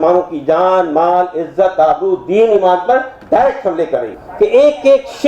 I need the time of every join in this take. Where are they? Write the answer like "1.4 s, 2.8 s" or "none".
4.1 s